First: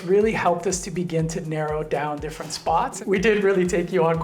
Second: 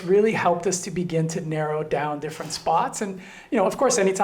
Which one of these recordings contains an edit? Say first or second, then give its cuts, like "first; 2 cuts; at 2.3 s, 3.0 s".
first; 1 cut; at 3.0 s